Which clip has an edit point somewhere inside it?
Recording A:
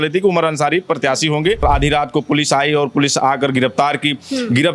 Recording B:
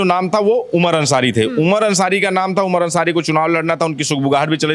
A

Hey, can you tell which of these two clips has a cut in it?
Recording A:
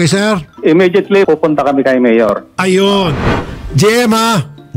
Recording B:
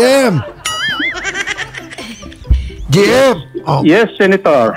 A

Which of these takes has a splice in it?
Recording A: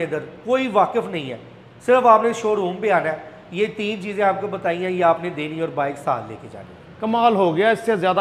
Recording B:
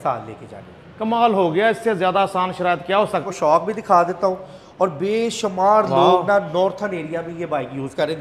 B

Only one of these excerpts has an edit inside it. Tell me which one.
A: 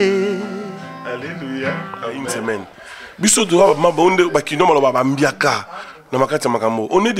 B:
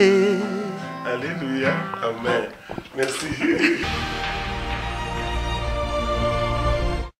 A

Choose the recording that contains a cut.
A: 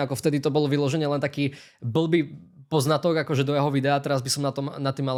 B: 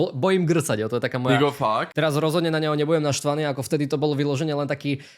B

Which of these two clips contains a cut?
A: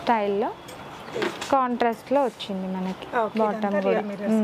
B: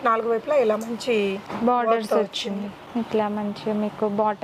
B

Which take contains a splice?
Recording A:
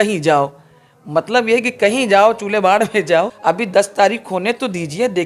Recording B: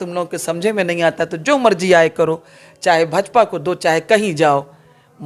A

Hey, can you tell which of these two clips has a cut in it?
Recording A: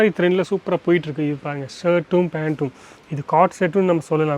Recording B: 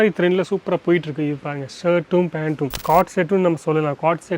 B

